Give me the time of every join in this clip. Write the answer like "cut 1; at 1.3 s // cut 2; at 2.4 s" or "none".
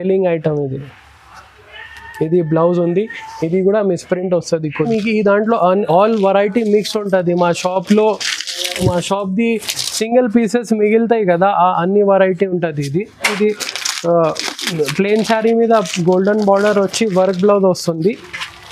cut 1; at 4.8 s // cut 2; at 13.3 s